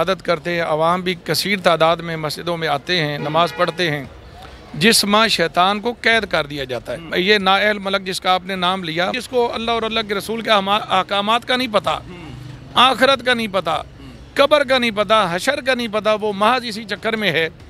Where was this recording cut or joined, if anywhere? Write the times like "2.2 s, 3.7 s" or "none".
7.0 s, 9.2 s

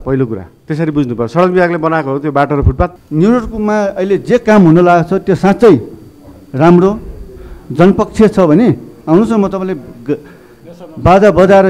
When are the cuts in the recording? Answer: 3.0 s

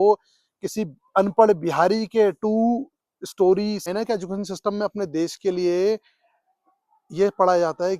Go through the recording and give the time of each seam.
3.9 s

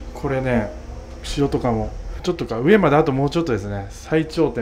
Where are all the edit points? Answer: 2.2 s

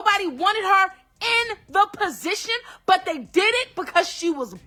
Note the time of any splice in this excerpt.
none

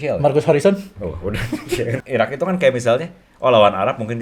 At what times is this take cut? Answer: 2.0 s

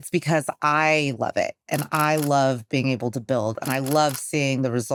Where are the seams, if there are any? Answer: none

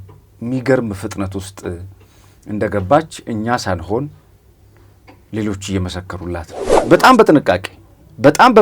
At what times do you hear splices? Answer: 6.6 s

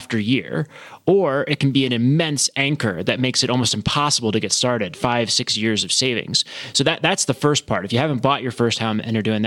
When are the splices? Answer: none

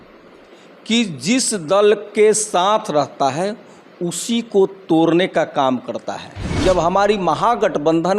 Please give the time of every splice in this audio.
6.5 s

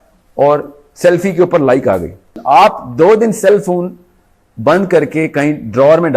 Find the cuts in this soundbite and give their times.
2.3 s

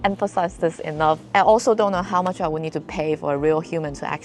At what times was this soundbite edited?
none

